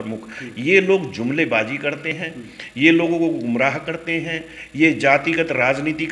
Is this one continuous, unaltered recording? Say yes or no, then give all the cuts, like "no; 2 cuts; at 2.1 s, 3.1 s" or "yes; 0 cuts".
yes; 0 cuts